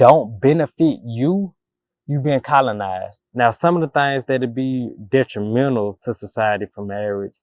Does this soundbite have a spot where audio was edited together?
yes; 1 cut; at 3.2 s

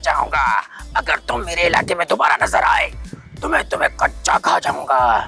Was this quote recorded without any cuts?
yes; 0 cuts

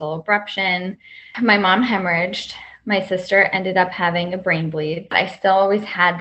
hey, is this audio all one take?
no; 2 cuts; at 1.3 s, 5.1 s

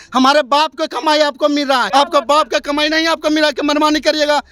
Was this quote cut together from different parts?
yes; 1 cut; at 1.9 s

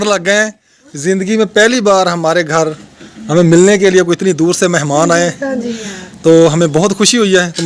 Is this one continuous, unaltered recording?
yes; 0 cuts

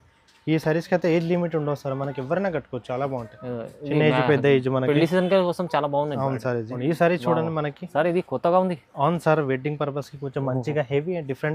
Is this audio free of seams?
no; 1 cut; at 6.7 s

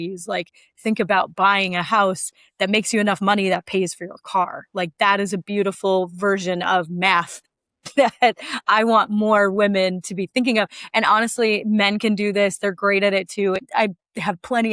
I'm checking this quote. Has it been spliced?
yes; 1 cut; at 13.6 s

